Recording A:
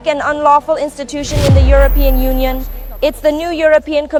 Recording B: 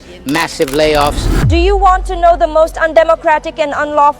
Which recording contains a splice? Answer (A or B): B